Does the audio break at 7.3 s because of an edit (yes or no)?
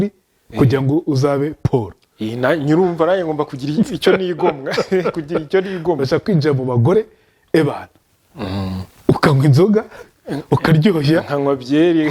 no